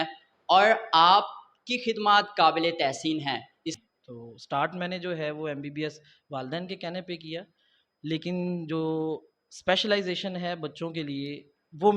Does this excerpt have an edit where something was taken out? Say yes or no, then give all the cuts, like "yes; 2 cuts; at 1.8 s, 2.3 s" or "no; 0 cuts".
yes; 1 cut; at 3.8 s